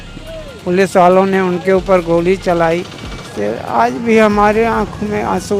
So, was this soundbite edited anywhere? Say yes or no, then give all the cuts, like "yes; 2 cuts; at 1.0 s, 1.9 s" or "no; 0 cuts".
yes; 1 cut; at 3.3 s